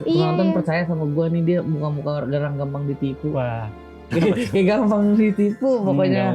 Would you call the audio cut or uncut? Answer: cut